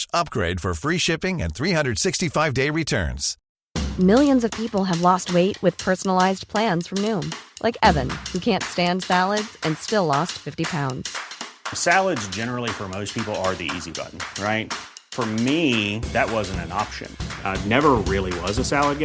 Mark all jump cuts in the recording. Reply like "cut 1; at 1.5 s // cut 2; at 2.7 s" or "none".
cut 1; at 3.3 s